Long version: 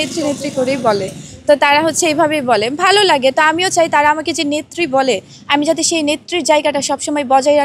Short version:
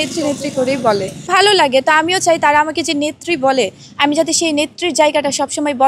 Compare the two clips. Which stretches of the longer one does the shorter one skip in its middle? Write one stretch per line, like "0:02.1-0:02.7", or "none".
0:01.2-0:02.7